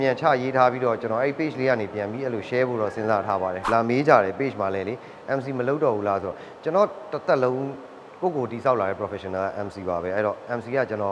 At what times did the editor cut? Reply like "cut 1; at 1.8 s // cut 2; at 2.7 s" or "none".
cut 1; at 3.6 s